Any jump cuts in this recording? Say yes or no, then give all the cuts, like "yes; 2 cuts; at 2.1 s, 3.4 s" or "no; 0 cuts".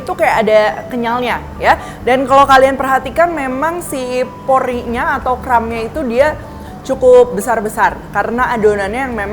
no; 0 cuts